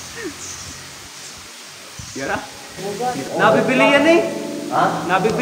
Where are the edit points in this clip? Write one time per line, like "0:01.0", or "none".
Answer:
0:02.8